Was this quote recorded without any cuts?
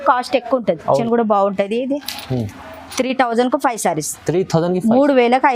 no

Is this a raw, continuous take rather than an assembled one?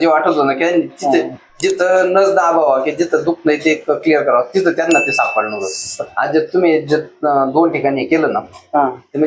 yes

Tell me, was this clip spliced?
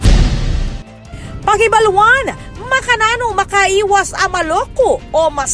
yes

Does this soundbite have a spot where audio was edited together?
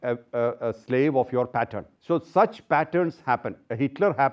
yes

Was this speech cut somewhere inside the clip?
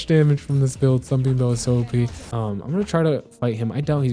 yes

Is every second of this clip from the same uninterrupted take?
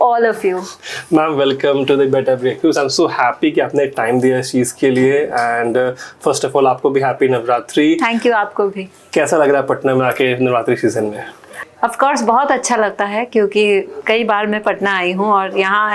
yes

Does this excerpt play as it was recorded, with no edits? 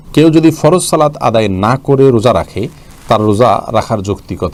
yes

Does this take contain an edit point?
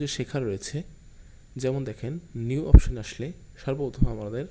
no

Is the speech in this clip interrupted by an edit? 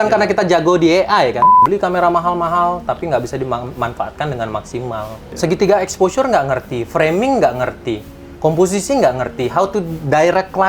yes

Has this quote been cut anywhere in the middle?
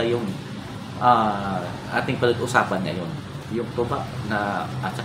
no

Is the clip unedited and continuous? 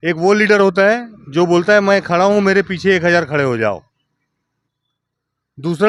yes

